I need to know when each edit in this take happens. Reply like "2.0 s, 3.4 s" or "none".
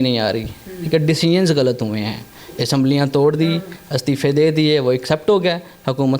none